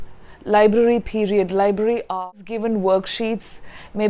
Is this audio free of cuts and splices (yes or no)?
no